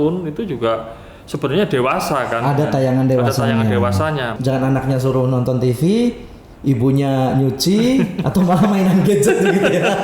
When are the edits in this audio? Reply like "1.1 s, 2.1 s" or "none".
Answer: 4.4 s